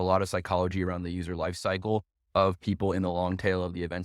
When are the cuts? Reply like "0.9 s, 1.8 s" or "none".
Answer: none